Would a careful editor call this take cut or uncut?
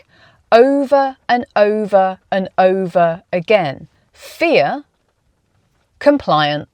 uncut